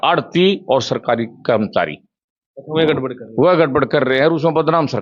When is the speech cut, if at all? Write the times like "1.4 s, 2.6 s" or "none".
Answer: none

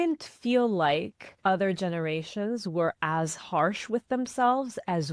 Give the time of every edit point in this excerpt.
1.2 s

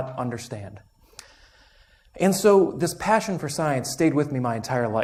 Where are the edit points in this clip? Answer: none

